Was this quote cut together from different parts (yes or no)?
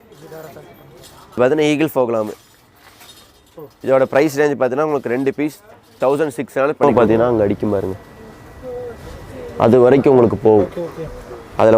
yes